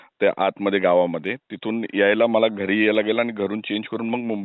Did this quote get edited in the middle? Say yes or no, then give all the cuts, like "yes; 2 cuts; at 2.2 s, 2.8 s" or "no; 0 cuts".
yes; 1 cut; at 2.9 s